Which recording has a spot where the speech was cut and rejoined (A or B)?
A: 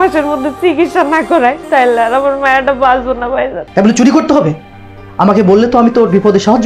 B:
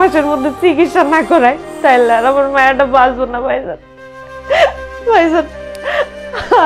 A